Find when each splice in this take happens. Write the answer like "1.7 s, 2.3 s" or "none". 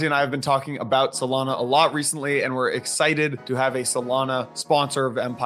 3.4 s, 4.5 s

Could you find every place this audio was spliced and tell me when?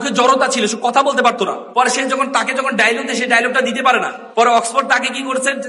1.6 s, 4.2 s

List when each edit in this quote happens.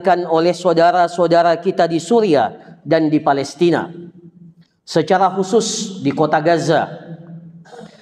none

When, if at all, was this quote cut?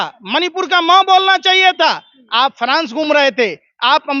none

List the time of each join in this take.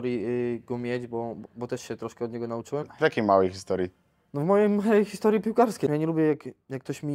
2.9 s, 5.9 s

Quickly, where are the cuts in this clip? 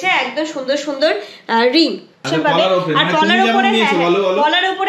2.2 s

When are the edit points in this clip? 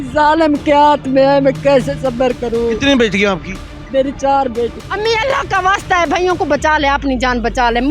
4.8 s

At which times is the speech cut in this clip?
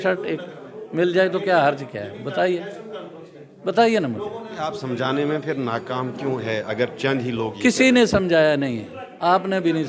none

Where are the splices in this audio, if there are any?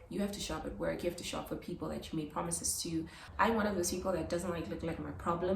3.2 s

